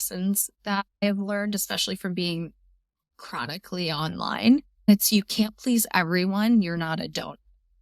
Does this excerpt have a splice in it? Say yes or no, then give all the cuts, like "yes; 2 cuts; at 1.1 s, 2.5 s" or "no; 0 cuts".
yes; 2 cuts; at 1.0 s, 4.9 s